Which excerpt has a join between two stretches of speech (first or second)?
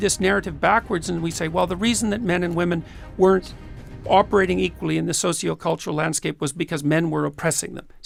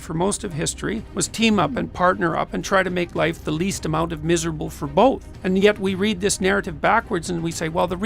second